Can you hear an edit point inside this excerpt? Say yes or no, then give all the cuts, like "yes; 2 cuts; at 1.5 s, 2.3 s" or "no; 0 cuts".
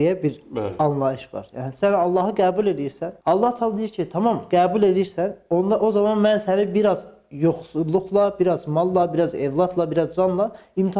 no; 0 cuts